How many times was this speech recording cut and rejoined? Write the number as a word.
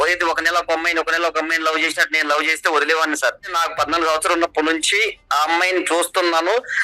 one